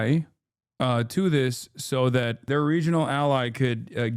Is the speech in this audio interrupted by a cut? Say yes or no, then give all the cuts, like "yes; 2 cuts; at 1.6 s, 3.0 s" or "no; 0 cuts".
yes; 1 cut; at 2.4 s